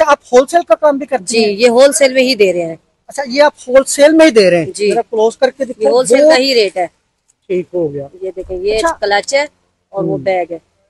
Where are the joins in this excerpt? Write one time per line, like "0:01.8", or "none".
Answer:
none